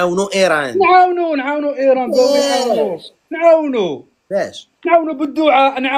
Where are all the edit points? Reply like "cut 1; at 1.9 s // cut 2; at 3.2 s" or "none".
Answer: none